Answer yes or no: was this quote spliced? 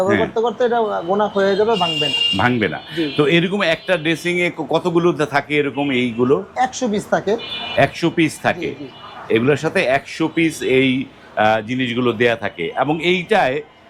no